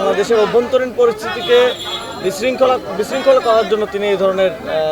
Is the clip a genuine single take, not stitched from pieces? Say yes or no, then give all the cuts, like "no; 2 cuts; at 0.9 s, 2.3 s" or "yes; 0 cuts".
yes; 0 cuts